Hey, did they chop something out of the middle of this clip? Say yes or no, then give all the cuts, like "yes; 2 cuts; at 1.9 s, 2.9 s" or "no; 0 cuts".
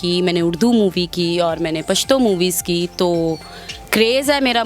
no; 0 cuts